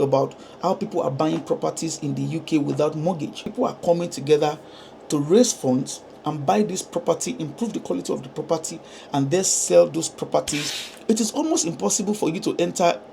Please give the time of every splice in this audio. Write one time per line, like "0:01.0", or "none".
0:03.5
0:10.8